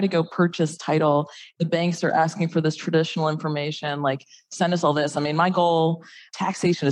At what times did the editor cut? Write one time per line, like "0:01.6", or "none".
0:01.5

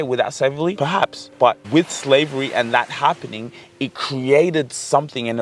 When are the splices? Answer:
0:01.1

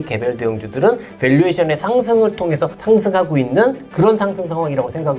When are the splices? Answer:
none

